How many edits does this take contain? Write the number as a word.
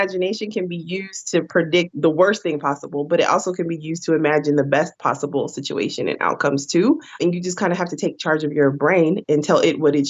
three